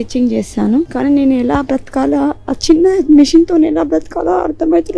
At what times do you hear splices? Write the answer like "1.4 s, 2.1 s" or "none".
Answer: 0.9 s